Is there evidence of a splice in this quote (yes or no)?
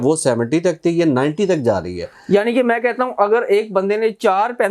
no